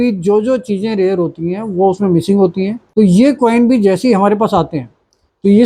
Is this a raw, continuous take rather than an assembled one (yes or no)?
no